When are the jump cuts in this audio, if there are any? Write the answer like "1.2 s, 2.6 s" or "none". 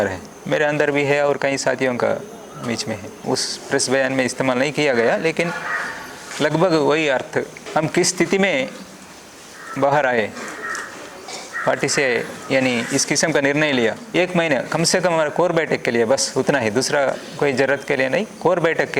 3.1 s, 7.6 s, 14.0 s